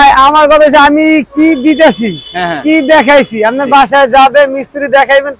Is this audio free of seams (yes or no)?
yes